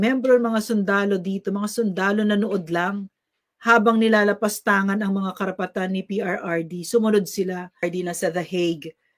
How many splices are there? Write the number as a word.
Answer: one